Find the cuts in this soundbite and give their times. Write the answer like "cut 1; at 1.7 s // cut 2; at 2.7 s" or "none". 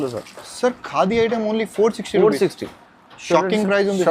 none

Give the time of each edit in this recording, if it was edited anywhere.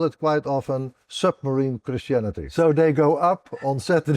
cut 1; at 2.4 s

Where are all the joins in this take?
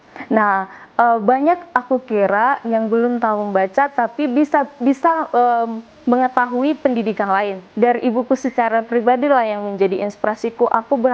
cut 1; at 7.6 s

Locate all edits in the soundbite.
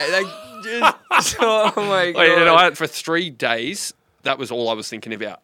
cut 1; at 2.7 s

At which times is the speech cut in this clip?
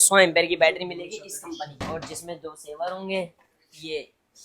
cut 1; at 1.8 s

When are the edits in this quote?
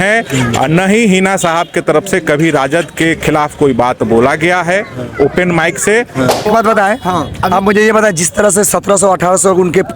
cut 1; at 6.5 s

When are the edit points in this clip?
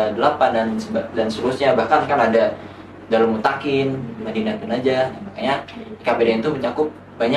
none

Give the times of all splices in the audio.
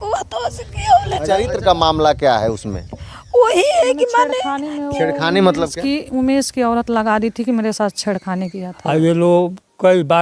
cut 1; at 1.4 s // cut 2; at 8.7 s

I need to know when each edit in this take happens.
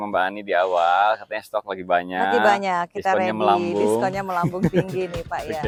none

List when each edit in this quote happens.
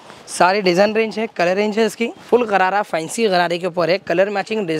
cut 1; at 2.2 s

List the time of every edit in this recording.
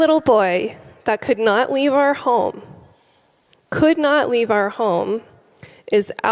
none

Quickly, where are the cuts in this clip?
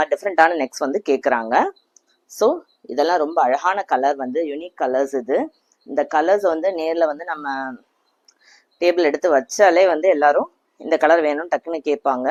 none

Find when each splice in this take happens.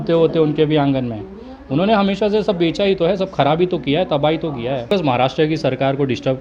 cut 1; at 4.9 s

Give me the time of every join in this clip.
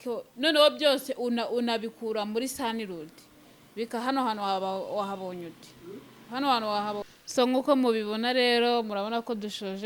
cut 1; at 7.0 s

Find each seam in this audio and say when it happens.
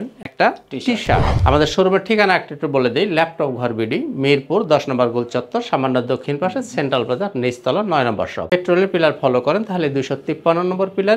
cut 1; at 1.4 s // cut 2; at 8.5 s

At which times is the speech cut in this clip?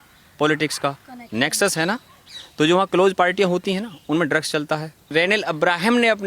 cut 1; at 5.1 s

